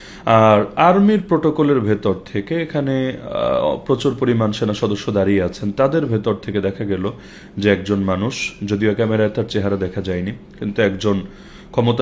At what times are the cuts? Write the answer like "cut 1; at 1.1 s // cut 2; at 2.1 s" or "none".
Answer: none